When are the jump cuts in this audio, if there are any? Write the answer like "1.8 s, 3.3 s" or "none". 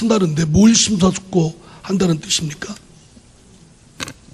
none